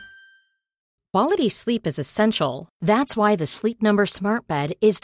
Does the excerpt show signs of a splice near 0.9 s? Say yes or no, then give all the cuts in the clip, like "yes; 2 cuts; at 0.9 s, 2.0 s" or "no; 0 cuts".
yes; 1 cut; at 0.9 s